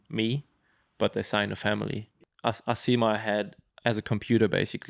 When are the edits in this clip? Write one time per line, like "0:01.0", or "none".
0:02.1
0:03.6